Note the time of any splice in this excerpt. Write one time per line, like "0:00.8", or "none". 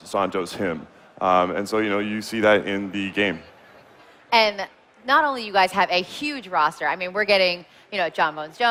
none